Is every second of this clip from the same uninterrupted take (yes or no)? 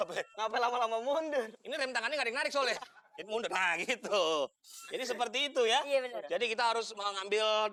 yes